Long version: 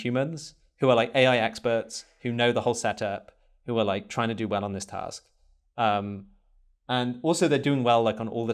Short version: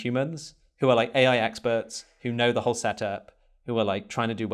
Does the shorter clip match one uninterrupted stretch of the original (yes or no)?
yes